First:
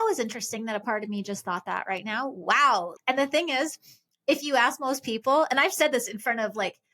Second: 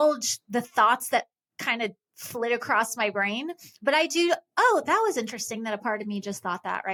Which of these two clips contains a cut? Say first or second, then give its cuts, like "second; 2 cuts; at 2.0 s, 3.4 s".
first; 1 cut; at 2.9 s